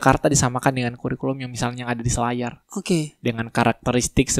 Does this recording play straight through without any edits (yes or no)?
yes